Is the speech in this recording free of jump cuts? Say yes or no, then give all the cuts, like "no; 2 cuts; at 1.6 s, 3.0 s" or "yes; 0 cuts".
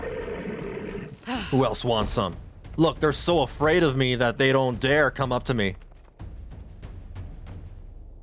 yes; 0 cuts